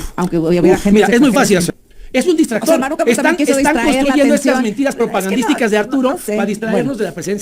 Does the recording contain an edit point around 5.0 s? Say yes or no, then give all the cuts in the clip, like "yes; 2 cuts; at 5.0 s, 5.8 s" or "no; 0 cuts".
no; 1 cut; at 1.7 s